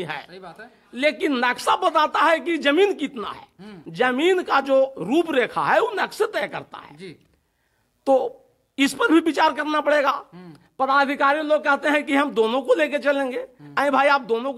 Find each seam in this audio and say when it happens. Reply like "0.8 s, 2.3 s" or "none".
none